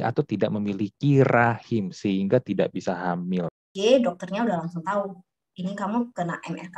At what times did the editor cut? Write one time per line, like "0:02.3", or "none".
0:03.7